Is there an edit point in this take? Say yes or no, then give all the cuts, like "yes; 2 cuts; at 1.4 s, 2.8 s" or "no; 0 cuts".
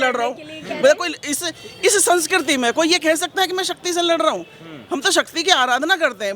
no; 0 cuts